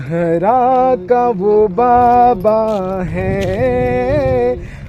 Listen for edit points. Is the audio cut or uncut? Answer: uncut